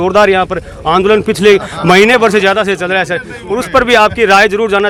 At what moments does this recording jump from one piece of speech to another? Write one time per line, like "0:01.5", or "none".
none